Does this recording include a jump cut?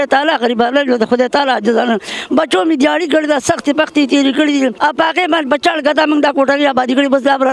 yes; 1 cut; at 4.8 s

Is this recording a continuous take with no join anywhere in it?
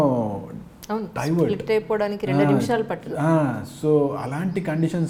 yes; 0 cuts

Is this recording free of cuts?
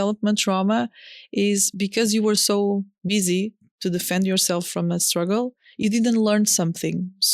yes; 0 cuts

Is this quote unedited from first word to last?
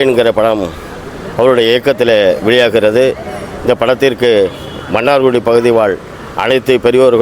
yes; 0 cuts

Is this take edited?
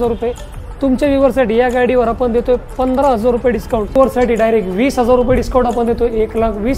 yes; 1 cut; at 4.0 s

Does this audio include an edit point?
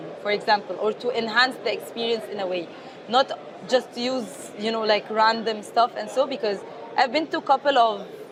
no; 0 cuts

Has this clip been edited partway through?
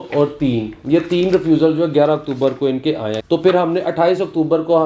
yes; 1 cut; at 3.1 s

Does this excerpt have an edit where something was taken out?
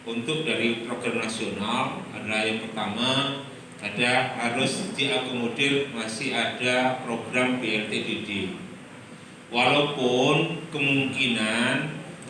no; 0 cuts

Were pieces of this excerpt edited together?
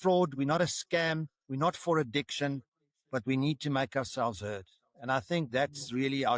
no; 0 cuts

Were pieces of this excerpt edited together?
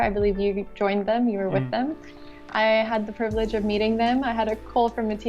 no; 0 cuts

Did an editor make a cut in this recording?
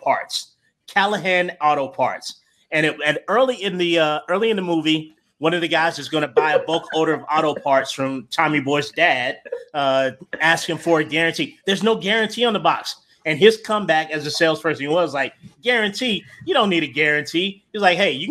no; 0 cuts

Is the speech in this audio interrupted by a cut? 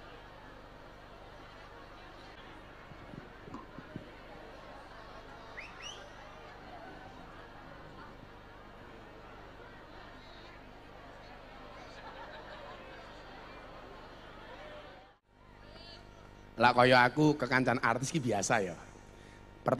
yes; 2 cuts; at 2.4 s, 15.1 s

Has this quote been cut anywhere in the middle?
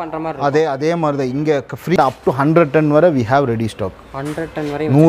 yes; 1 cut; at 2.0 s

